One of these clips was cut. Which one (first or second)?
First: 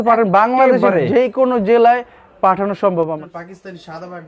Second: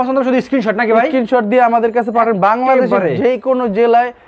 first